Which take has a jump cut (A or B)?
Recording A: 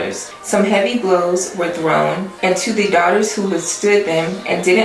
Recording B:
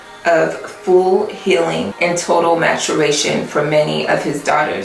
B